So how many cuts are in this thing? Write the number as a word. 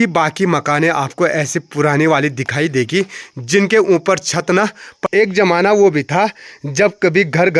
one